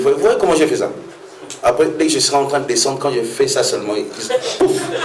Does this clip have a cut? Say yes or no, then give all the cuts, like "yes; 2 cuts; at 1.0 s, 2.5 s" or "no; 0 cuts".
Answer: no; 0 cuts